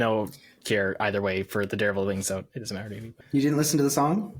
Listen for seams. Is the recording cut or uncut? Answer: uncut